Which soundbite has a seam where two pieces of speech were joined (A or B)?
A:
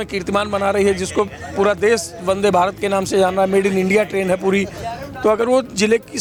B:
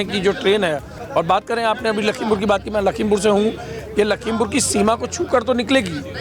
B